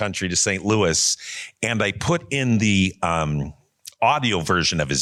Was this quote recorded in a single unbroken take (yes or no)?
yes